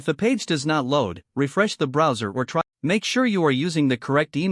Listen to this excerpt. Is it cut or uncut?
cut